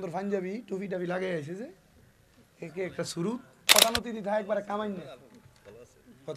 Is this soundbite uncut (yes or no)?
no